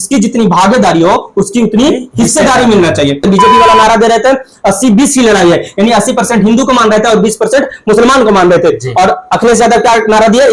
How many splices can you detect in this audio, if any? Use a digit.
1